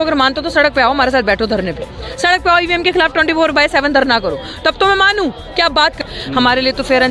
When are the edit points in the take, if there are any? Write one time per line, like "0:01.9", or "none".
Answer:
0:06.1